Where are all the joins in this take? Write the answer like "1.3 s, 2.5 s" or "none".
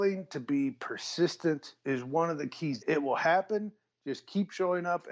1.7 s, 2.8 s